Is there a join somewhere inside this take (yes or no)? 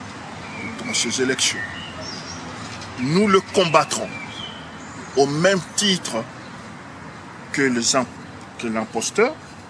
no